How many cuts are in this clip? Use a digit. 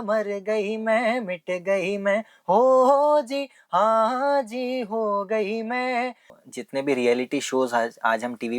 1